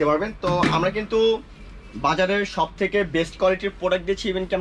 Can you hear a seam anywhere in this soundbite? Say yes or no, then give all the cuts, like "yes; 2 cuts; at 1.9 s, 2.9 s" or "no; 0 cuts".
no; 0 cuts